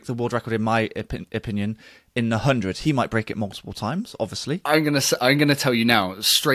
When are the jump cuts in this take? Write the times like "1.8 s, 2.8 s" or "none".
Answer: 4.6 s